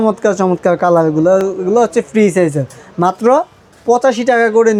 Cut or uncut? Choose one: uncut